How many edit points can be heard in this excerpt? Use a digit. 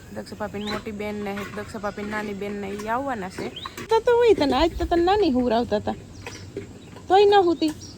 1